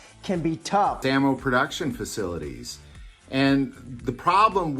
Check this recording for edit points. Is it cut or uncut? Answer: cut